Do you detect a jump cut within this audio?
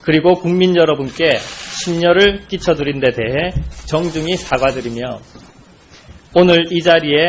no; 0 cuts

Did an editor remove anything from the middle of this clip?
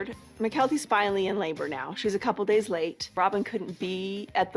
yes; 1 cut; at 3.0 s

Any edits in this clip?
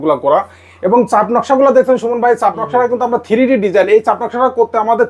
no; 0 cuts

